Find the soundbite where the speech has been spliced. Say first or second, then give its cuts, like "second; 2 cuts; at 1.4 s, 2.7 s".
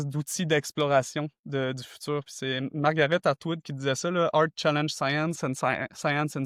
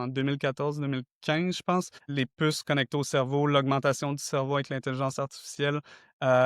second; 1 cut; at 2.0 s